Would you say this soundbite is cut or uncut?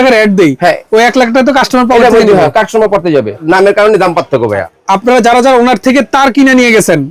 cut